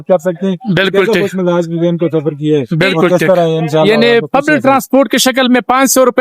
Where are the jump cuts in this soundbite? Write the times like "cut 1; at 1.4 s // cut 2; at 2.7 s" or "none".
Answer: cut 1; at 3.9 s

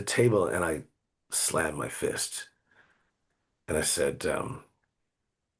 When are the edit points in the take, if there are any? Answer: none

